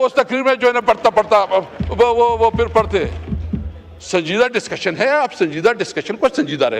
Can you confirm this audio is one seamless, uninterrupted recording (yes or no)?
yes